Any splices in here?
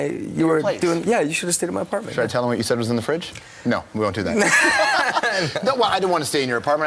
yes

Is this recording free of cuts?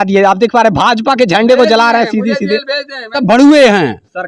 no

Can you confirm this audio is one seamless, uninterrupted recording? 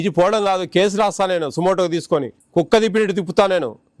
no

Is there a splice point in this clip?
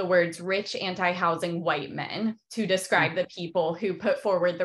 no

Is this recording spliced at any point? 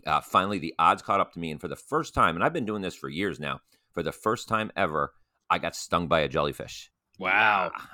no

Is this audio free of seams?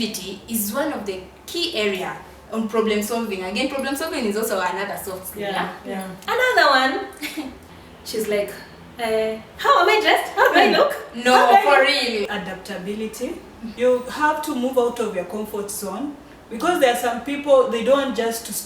no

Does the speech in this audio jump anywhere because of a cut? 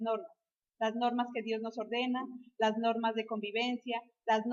no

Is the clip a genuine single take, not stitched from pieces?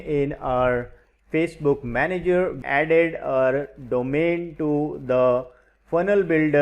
no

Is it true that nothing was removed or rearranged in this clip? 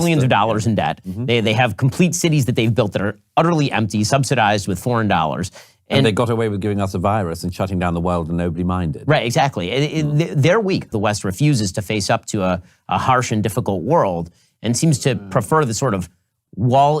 no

